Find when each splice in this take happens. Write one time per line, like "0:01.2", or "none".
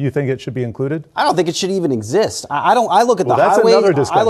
0:02.4